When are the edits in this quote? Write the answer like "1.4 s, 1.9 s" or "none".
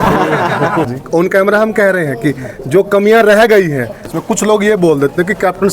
0.9 s, 4.1 s